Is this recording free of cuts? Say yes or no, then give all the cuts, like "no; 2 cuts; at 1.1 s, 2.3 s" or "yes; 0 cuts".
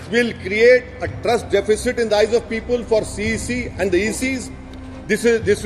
yes; 0 cuts